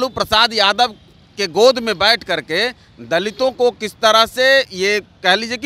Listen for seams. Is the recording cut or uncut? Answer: uncut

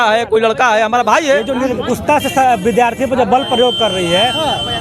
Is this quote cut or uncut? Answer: cut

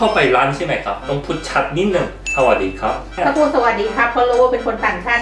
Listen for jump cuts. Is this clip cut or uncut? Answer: cut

